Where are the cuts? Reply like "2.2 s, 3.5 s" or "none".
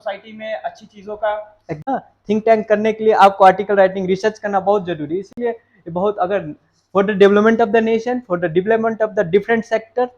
1.8 s